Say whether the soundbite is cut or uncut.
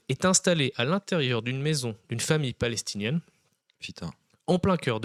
uncut